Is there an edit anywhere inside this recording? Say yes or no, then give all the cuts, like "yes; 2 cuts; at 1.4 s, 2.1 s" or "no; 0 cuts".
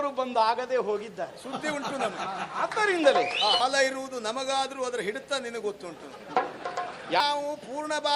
yes; 2 cuts; at 3.6 s, 7.2 s